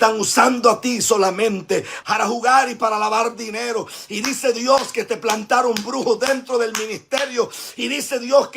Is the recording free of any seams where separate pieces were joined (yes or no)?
no